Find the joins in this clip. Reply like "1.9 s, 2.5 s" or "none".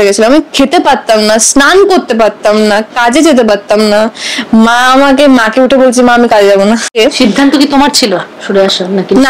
6.9 s